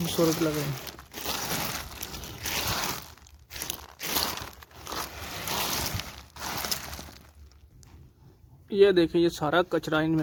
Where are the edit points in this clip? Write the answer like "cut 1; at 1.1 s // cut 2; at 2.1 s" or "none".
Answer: none